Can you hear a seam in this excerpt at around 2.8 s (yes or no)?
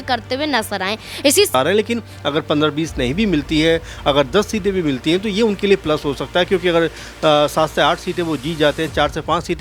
no